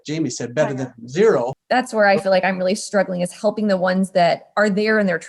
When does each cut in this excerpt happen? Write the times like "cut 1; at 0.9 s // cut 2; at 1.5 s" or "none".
cut 1; at 1.6 s